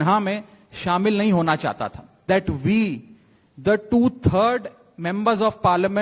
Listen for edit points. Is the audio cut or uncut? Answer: cut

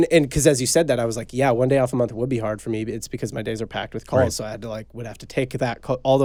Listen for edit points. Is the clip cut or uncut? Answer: uncut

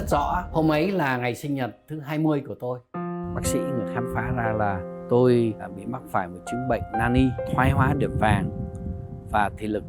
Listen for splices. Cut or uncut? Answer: uncut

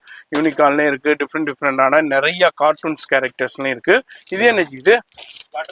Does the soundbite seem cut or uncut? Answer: uncut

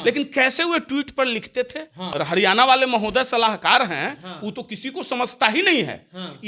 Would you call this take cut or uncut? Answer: cut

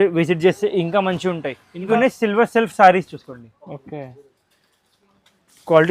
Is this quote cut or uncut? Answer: cut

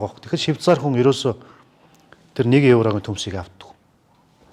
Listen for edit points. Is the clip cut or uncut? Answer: uncut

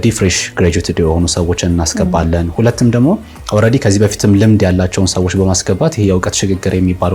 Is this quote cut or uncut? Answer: uncut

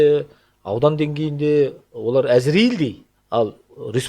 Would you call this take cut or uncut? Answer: cut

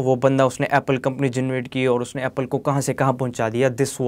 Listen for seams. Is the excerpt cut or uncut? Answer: uncut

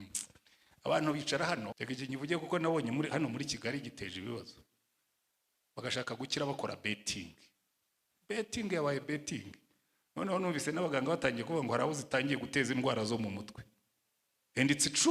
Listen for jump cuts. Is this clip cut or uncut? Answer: cut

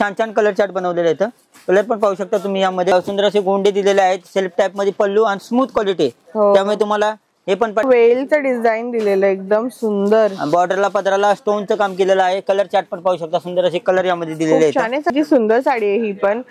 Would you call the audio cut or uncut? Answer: cut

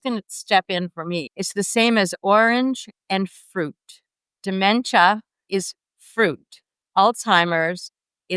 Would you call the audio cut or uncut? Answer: cut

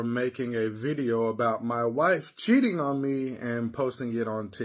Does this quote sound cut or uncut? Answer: uncut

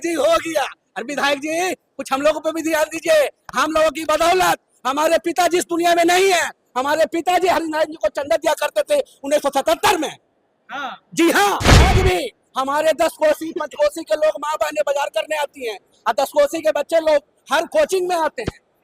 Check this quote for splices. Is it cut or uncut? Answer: cut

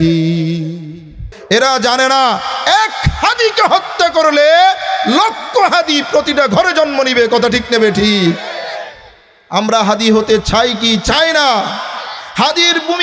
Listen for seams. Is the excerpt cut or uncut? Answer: cut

